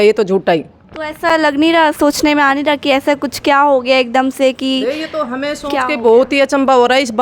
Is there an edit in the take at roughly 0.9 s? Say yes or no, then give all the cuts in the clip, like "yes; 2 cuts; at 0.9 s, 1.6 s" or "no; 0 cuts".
no; 0 cuts